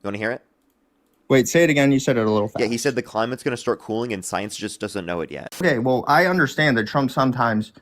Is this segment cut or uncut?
cut